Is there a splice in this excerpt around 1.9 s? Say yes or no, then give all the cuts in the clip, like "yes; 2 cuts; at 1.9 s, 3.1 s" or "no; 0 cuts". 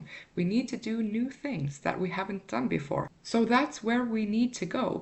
no; 1 cut; at 3.2 s